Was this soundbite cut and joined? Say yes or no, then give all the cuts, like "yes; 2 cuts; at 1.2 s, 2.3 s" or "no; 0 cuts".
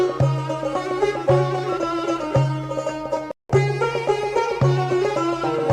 yes; 1 cut; at 3.4 s